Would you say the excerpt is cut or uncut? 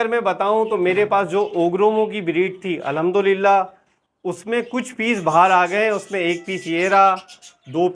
uncut